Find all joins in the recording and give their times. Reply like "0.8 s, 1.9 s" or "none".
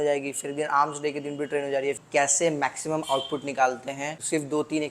2.0 s